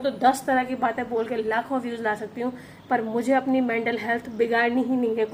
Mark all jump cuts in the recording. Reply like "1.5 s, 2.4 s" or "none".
none